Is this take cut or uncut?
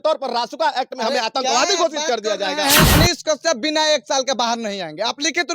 cut